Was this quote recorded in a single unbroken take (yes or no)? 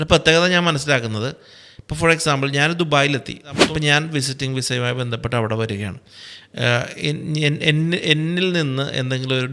no